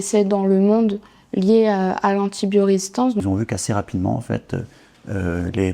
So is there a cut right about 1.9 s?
no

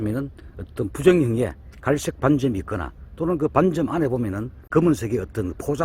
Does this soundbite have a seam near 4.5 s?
yes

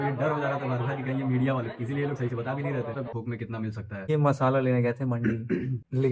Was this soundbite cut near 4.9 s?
no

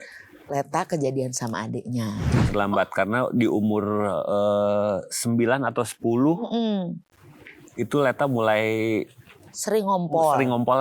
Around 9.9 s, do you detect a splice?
no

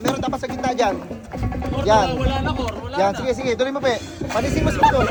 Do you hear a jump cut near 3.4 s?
no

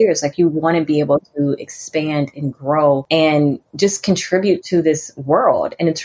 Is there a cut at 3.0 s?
yes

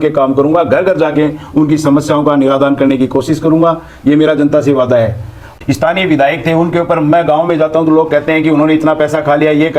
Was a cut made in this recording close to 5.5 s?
yes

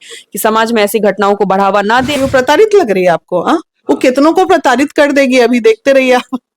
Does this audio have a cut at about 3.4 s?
no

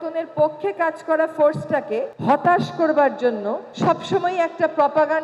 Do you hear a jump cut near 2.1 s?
yes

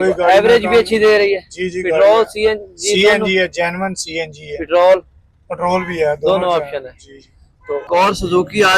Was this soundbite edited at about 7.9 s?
yes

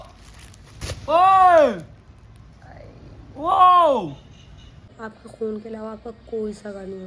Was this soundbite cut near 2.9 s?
no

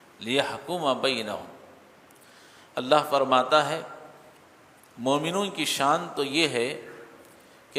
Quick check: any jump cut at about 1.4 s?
no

